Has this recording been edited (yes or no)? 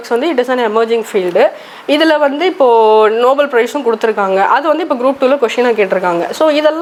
no